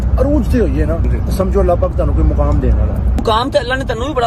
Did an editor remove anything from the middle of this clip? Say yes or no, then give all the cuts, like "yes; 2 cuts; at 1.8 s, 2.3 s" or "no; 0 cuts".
yes; 2 cuts; at 1.1 s, 3.2 s